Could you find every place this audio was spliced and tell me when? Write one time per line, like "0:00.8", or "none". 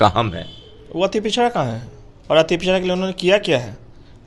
none